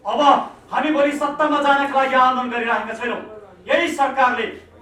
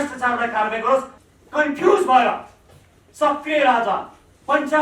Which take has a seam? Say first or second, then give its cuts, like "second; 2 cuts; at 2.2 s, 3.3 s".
second; 1 cut; at 1.1 s